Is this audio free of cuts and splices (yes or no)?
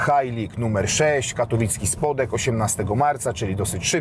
yes